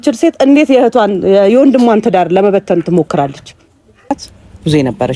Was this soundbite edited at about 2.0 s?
no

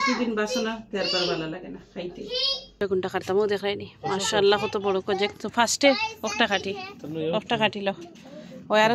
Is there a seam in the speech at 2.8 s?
yes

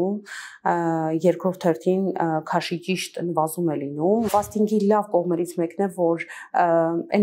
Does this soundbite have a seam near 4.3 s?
yes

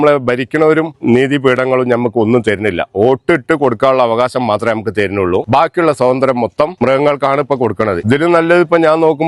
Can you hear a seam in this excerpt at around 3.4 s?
no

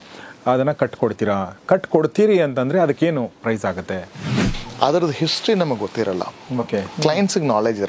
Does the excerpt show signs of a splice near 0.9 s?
no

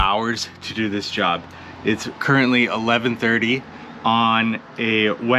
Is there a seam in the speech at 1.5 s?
yes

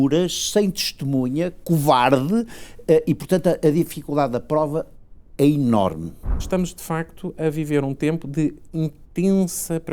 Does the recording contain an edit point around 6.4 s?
yes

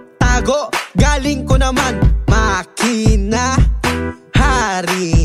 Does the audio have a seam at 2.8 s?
no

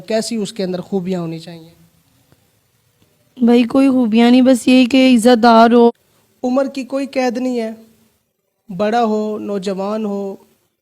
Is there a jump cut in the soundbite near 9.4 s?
no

